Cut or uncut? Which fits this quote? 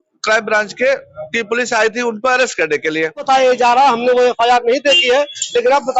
cut